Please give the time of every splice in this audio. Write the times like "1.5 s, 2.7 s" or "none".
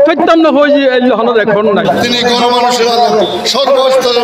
2.0 s